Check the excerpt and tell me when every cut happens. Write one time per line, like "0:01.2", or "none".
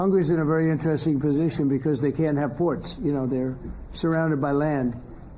0:03.3